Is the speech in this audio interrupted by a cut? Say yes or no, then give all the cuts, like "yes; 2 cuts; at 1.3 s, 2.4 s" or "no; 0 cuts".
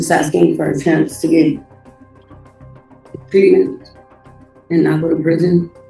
no; 0 cuts